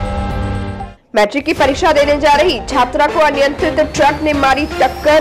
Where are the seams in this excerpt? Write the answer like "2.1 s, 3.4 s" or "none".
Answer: 0.9 s